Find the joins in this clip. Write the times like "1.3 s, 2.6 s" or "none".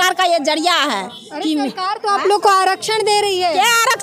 none